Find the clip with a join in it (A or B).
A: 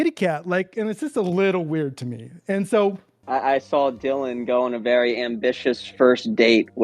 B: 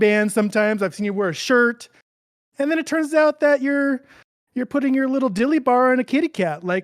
A